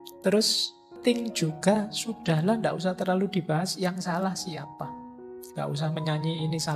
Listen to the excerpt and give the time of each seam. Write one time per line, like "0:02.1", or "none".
0:00.9
0:05.0